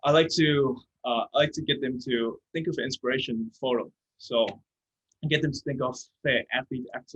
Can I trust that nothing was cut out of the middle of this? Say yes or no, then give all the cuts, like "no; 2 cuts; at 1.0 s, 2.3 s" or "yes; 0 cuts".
yes; 0 cuts